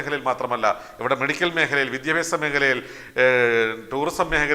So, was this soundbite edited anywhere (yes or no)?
no